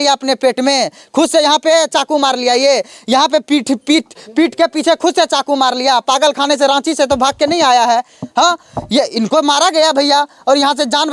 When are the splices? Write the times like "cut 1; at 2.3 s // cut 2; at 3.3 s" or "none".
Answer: none